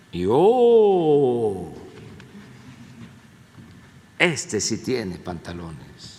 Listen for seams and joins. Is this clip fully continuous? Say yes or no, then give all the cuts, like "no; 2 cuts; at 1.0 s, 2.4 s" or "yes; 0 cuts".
yes; 0 cuts